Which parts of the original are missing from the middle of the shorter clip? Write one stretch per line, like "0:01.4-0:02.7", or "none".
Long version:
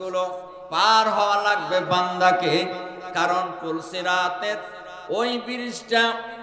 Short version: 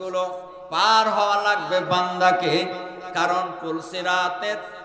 none